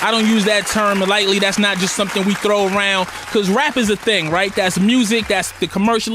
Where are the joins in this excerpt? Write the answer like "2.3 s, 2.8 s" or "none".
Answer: 1.3 s